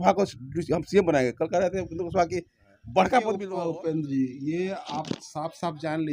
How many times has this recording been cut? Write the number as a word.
one